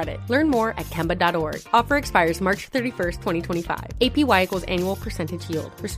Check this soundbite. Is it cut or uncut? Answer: uncut